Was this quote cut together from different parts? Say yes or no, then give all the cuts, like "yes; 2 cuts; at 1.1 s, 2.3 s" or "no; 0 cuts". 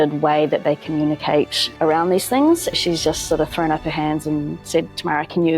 yes; 1 cut; at 2.7 s